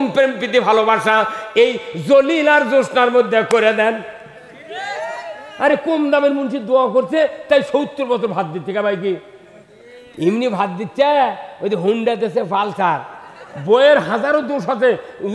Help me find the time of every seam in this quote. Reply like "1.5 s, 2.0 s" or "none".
none

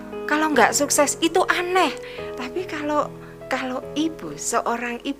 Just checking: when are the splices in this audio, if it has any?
2.1 s

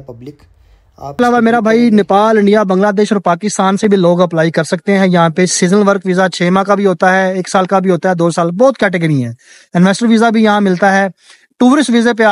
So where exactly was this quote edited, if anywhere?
1.2 s

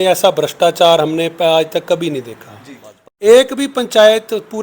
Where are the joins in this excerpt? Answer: 3.2 s

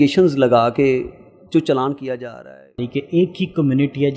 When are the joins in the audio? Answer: 2.7 s

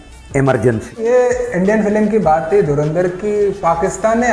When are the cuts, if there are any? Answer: 1.4 s

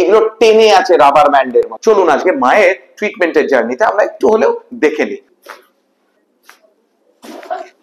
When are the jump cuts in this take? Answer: 1.7 s, 5.3 s, 7.0 s

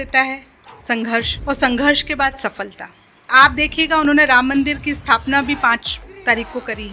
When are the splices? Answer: 1.3 s, 3.3 s

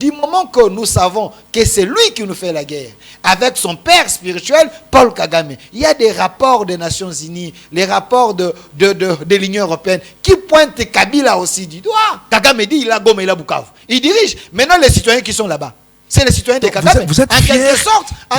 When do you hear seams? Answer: 12.2 s

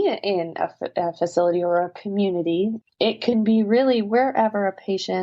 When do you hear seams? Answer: 2.8 s

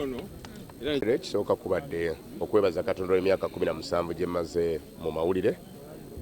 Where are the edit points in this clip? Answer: 1.0 s

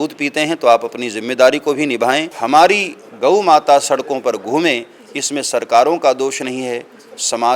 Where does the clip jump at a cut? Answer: 2.3 s

